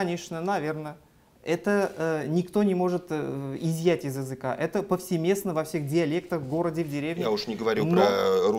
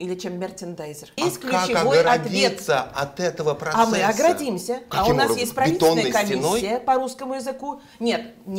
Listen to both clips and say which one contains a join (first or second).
second